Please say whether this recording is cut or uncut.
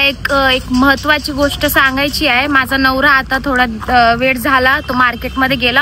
uncut